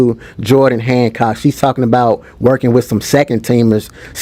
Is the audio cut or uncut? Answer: uncut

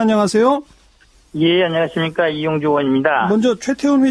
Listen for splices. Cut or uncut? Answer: uncut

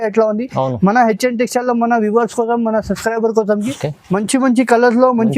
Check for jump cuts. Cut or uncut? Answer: cut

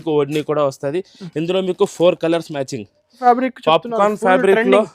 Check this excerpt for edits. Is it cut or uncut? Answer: cut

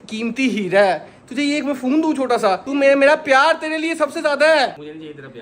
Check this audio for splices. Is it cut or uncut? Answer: uncut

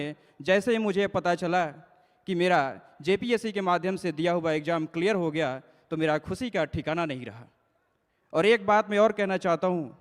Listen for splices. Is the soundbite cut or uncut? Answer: uncut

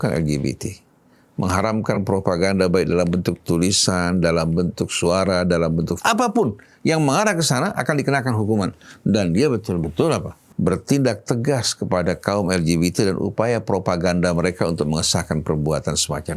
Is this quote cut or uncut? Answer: cut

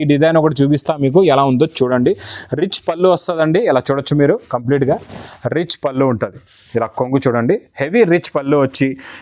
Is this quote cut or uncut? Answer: uncut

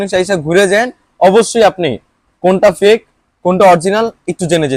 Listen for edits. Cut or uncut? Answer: uncut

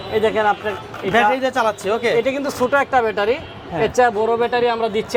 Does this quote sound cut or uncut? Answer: uncut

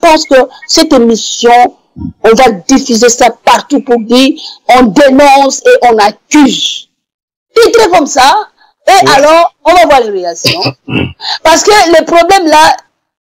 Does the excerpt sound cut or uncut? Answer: uncut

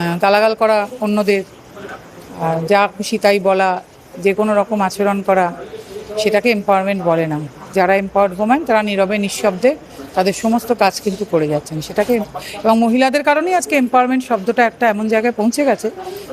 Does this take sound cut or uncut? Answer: uncut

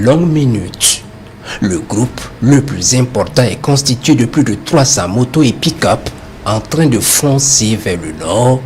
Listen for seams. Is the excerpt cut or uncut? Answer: uncut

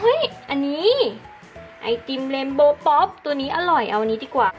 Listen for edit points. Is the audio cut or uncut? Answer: uncut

